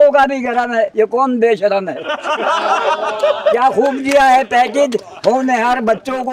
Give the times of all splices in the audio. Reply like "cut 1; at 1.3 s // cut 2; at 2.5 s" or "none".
cut 1; at 0.9 s